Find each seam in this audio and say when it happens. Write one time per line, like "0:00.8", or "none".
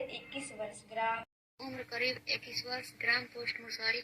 0:01.3